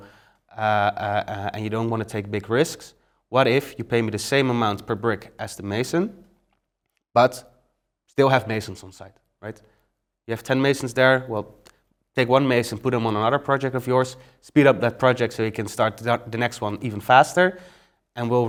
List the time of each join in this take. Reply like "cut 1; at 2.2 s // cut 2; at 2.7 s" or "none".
none